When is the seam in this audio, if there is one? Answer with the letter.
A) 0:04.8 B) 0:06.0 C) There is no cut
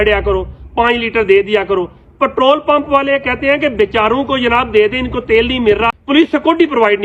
B